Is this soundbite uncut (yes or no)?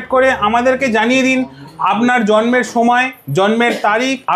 yes